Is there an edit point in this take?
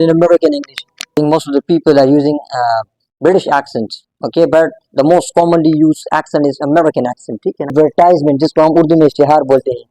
yes; 2 cuts; at 1.2 s, 7.7 s

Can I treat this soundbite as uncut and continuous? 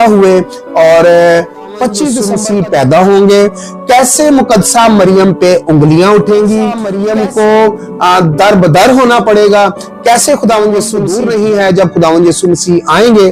no; 3 cuts; at 2.2 s, 6.9 s, 11.0 s

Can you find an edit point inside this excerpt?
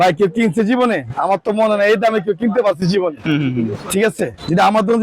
no; 0 cuts

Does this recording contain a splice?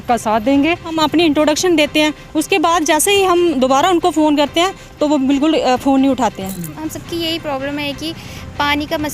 yes; 2 cuts; at 1.0 s, 6.9 s

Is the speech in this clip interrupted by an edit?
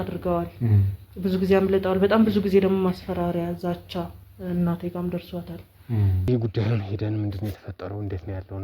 yes; 1 cut; at 6.2 s

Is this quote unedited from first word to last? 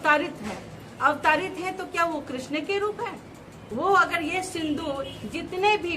no; 1 cut; at 3.6 s

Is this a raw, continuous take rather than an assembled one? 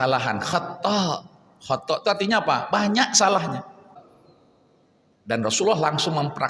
no; 1 cut; at 4.1 s

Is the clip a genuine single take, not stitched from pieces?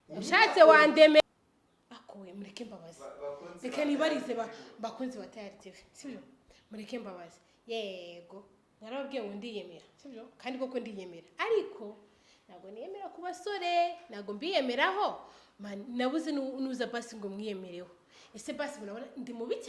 no; 1 cut; at 1.2 s

